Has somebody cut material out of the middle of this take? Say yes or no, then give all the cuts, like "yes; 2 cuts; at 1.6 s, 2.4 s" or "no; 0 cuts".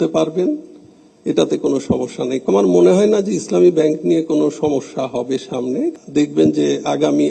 yes; 2 cuts; at 2.5 s, 6.0 s